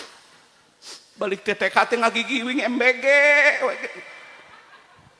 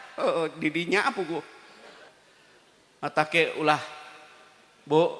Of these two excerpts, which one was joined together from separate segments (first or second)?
second